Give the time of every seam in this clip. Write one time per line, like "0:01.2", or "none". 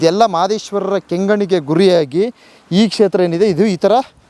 none